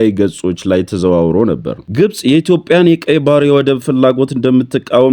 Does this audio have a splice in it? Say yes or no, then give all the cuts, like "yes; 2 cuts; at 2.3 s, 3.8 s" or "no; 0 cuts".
yes; 1 cut; at 1.8 s